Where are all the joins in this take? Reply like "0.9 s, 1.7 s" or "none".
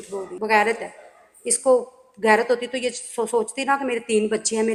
none